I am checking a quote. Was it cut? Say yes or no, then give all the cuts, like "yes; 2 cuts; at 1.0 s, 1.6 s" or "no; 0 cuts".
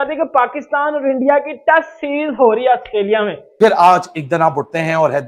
yes; 1 cut; at 3.4 s